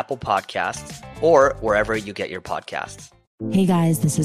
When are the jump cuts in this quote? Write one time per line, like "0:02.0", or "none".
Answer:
0:03.3